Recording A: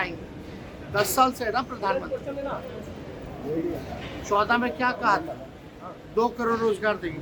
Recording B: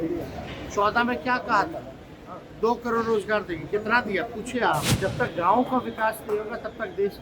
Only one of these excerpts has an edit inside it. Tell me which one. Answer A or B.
B